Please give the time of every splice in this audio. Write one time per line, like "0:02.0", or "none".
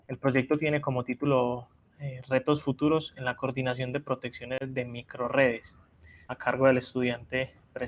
0:04.6